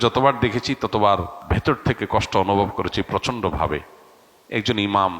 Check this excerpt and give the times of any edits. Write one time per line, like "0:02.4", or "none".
0:01.5

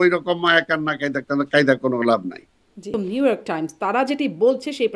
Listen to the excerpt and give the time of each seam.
0:02.9

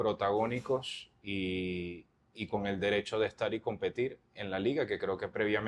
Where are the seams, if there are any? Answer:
none

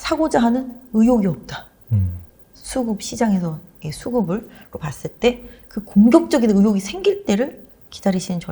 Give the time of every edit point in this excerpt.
none

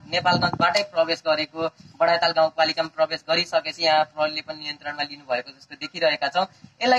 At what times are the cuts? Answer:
none

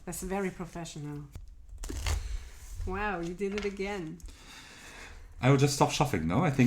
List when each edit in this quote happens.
0:01.4

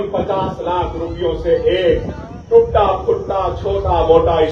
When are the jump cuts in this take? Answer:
none

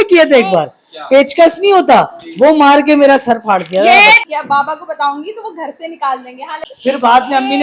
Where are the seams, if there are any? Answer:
0:04.2
0:06.7

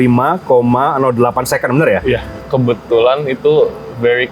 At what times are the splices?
0:02.3

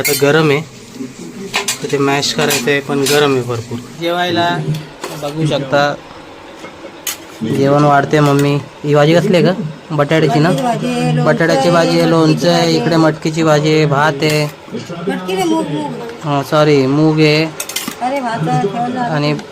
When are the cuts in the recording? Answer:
0:04.0

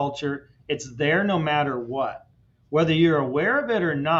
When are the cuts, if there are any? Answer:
none

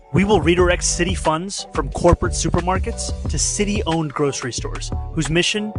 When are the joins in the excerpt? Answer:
0:02.7

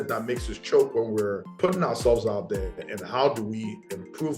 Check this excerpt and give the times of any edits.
0:01.4

